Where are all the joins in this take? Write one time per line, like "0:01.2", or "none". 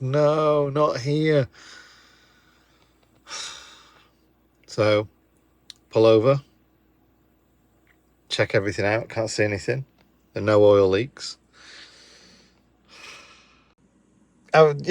0:13.3